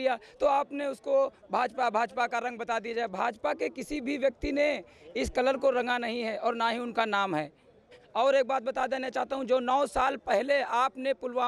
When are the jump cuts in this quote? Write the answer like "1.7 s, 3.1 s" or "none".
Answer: 8.0 s

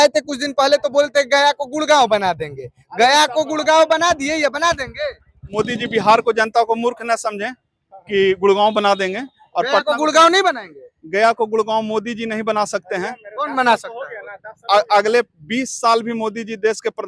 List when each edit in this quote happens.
5.5 s

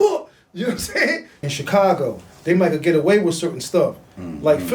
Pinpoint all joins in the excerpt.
1.3 s

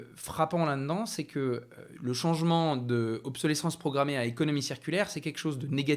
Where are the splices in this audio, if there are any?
none

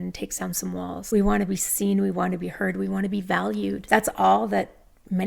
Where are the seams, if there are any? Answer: 1.1 s, 3.8 s

